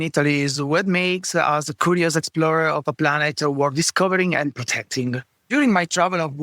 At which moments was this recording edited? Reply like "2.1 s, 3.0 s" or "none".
5.5 s